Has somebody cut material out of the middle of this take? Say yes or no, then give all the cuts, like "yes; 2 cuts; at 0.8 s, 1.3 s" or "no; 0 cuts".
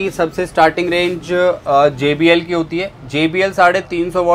no; 0 cuts